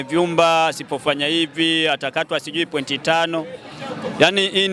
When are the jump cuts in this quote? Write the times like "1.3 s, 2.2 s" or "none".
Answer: none